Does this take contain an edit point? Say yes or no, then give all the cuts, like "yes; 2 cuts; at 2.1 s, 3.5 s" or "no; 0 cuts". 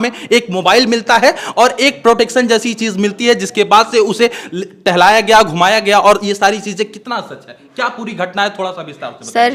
no; 0 cuts